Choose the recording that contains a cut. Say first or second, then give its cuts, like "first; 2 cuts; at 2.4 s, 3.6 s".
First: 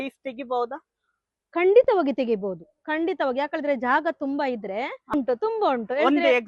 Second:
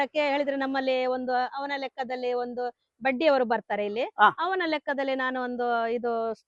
first; 1 cut; at 5.1 s